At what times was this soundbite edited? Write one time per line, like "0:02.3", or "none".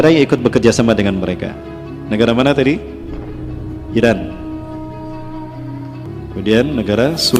0:04.7
0:06.3